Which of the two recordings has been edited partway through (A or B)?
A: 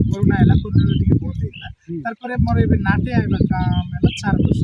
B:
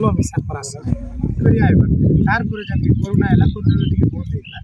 B